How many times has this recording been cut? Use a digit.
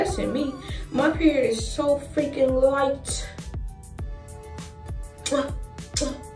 0